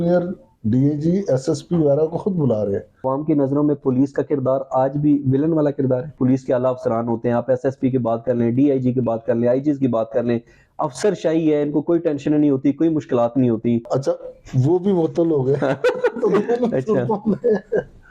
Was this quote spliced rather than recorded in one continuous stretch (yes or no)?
yes